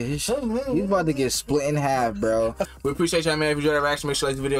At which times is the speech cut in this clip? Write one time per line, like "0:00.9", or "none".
0:02.7

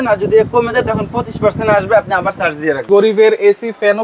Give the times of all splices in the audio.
0:02.8

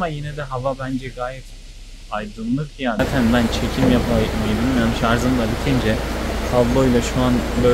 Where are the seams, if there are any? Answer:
0:03.0

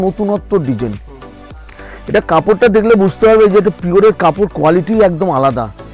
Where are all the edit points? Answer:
none

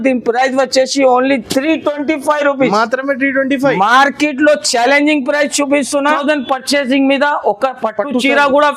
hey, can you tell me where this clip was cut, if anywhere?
0:06.2

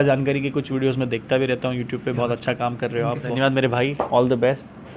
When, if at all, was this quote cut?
0:03.3

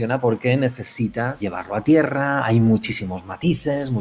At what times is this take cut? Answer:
0:01.4

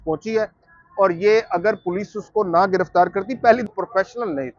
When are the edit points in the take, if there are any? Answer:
0:03.7

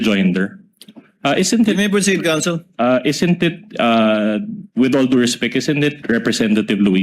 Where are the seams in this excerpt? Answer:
0:04.6
0:06.0

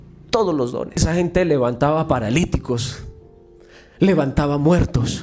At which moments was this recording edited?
0:01.0

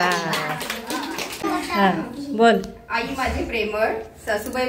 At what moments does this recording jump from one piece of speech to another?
0:01.4

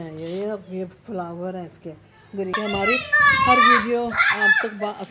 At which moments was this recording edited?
0:02.6

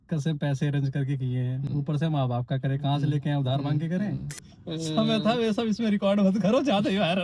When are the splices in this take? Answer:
0:04.4

